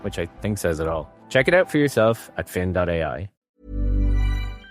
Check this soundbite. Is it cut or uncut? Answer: cut